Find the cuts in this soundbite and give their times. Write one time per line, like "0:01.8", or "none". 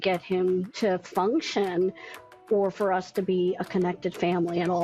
none